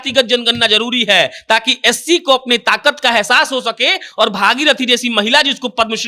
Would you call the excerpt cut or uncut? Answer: uncut